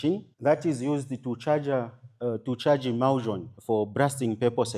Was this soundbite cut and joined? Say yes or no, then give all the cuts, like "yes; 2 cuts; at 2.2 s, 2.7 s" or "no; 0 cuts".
no; 0 cuts